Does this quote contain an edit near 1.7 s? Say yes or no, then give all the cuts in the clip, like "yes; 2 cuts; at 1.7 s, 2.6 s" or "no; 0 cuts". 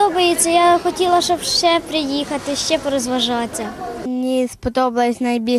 no; 1 cut; at 4.0 s